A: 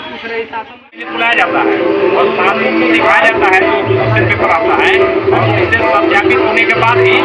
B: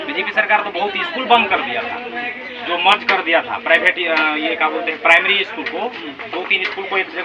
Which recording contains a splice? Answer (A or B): A